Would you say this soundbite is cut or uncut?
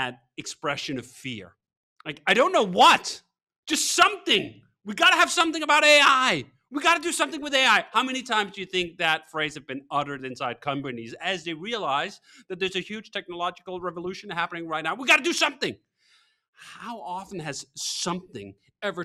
uncut